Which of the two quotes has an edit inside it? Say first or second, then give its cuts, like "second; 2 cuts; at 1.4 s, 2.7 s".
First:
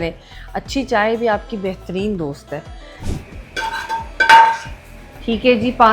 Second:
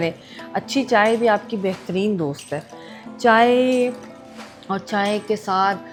first; 1 cut; at 3.1 s